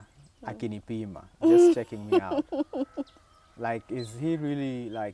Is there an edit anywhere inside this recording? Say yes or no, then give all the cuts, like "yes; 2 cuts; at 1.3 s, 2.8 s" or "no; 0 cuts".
no; 0 cuts